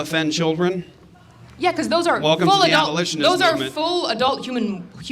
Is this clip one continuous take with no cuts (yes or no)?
yes